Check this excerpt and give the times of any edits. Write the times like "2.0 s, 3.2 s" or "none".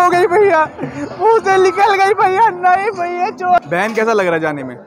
3.6 s